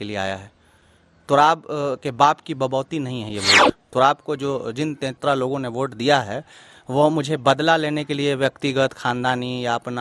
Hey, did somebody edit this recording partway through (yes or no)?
yes